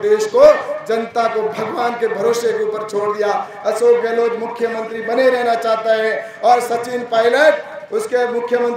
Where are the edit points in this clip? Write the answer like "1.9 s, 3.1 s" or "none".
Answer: none